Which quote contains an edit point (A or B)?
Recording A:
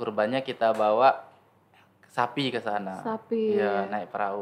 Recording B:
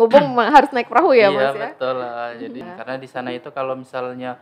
B